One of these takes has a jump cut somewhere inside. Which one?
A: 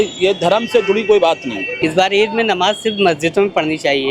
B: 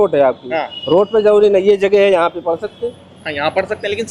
A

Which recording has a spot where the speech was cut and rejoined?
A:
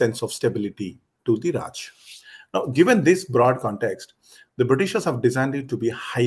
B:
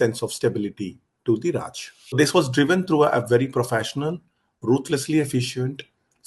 B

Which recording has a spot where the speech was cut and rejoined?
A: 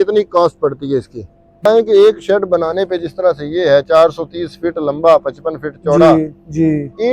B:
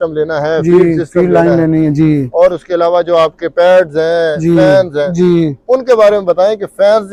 A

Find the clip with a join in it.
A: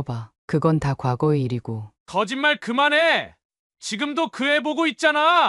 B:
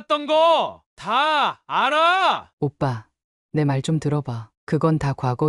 B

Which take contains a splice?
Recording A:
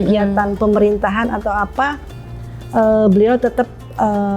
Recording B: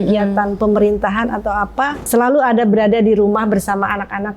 B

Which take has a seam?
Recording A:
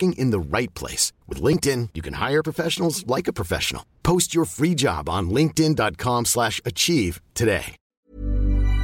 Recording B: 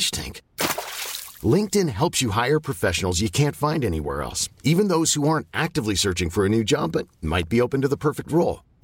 A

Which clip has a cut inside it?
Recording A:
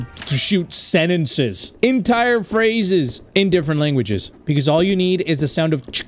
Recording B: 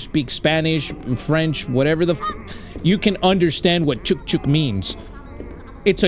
A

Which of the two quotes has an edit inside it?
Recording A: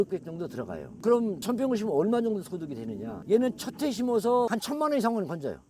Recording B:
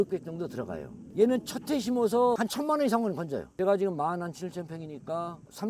B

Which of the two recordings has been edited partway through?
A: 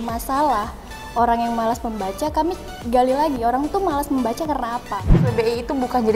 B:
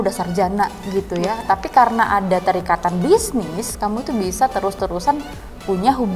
A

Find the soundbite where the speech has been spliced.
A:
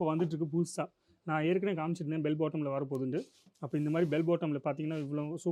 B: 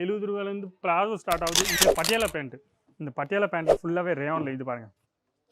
B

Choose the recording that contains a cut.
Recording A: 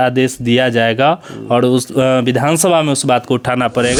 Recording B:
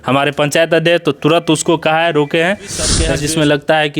B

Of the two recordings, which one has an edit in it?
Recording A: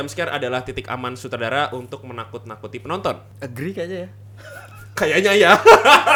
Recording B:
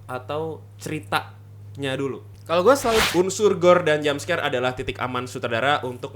B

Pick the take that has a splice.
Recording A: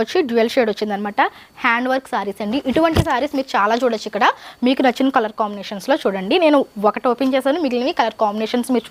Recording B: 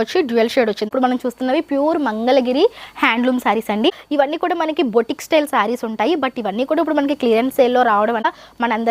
B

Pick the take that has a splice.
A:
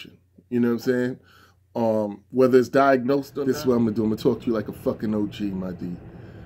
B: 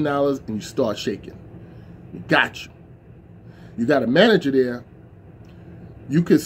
A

